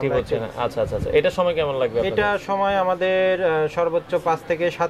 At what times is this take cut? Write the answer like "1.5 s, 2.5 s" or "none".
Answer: none